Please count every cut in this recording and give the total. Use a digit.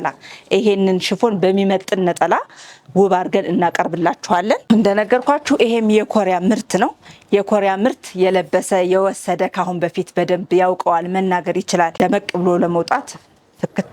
2